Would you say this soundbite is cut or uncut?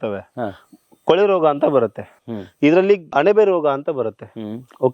cut